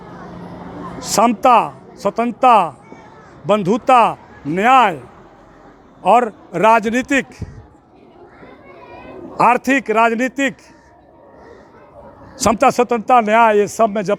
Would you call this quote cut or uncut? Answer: uncut